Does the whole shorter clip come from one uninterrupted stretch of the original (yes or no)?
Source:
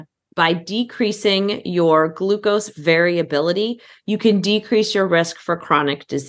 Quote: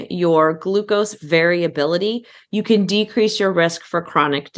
yes